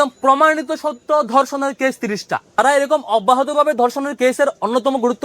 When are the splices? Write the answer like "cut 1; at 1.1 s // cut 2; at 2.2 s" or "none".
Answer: cut 1; at 2.6 s